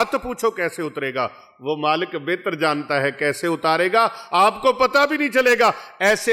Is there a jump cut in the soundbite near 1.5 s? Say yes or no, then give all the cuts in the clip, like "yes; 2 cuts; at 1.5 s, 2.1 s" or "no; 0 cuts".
no; 0 cuts